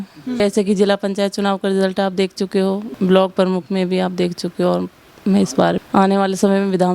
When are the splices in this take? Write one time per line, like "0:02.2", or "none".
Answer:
0:02.9
0:05.8